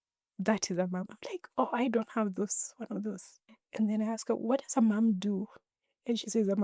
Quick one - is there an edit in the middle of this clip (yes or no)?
no